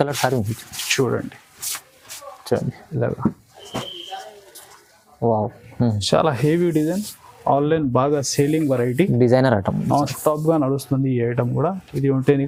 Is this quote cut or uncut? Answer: uncut